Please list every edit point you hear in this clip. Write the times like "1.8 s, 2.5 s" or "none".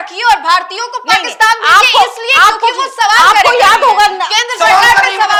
none